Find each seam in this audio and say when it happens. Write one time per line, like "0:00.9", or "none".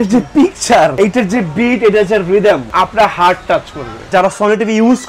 0:00.9
0:02.7
0:04.1